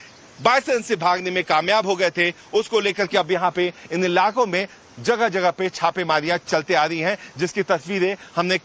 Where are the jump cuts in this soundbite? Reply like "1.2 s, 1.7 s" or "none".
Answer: 2.2 s